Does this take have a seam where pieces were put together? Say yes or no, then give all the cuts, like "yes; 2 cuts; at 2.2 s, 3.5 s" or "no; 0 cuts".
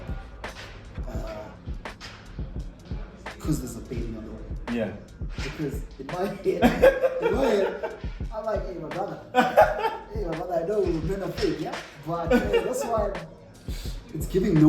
no; 0 cuts